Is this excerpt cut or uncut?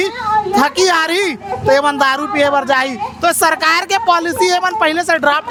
uncut